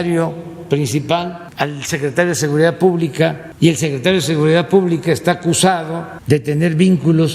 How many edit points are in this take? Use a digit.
3